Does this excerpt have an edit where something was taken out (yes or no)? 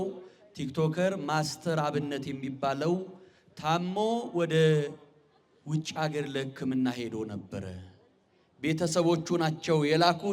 no